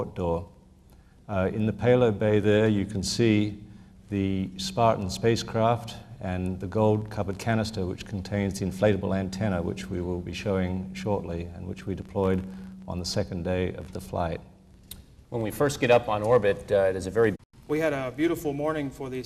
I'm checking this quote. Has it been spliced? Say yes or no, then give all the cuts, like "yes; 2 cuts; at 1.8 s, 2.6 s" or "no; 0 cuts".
no; 0 cuts